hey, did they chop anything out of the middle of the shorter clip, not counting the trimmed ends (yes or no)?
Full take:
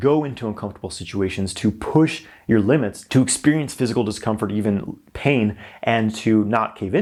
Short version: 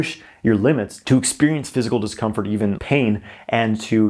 yes